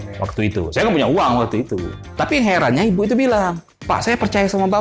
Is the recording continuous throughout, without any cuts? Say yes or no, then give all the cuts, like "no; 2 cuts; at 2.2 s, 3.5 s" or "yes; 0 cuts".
no; 2 cuts; at 2.0 s, 3.7 s